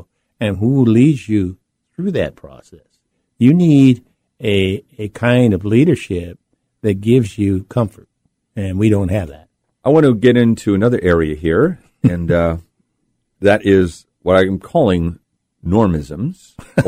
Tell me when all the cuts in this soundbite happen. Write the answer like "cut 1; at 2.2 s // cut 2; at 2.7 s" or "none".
none